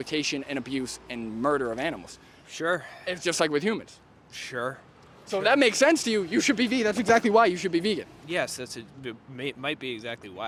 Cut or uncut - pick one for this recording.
uncut